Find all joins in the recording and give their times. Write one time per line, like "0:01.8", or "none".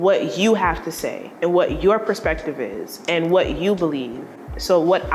none